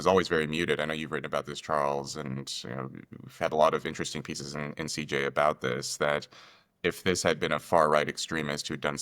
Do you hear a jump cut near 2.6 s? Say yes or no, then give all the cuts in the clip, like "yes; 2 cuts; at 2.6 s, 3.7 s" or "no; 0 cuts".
no; 0 cuts